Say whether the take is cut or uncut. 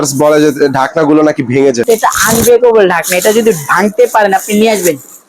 cut